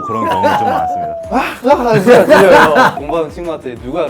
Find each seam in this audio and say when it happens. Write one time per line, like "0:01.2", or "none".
0:01.2